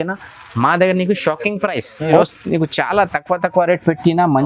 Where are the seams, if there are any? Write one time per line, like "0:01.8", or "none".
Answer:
0:02.2

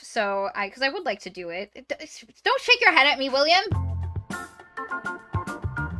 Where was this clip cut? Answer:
0:01.8
0:03.7

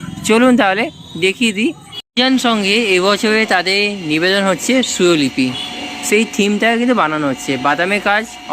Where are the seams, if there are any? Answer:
0:02.1

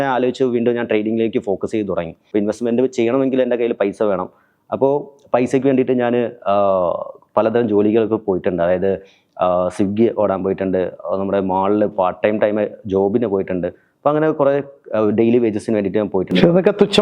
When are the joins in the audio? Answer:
0:02.2

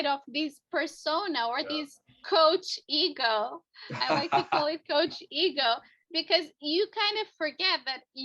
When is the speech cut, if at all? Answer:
0:02.2

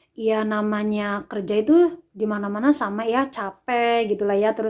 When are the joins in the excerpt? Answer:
none

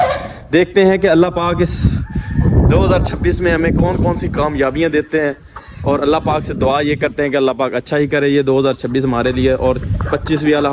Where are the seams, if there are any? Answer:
none

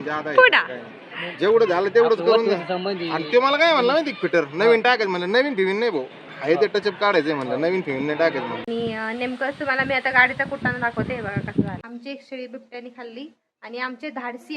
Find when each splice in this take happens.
0:08.6
0:11.8

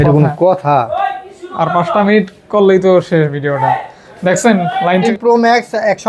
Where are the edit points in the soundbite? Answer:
0:05.1

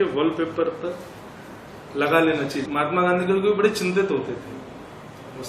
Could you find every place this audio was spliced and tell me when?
0:02.7

